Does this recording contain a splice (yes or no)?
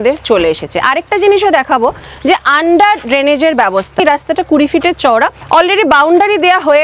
yes